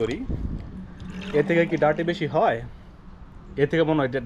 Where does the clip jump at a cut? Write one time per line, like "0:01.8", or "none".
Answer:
none